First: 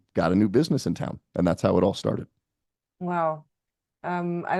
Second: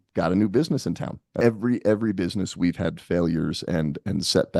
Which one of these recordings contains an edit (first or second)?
second